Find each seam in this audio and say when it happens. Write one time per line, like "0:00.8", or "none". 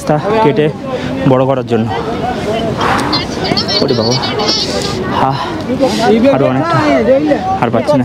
none